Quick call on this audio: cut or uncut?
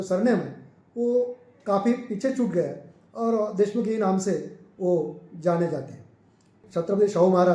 cut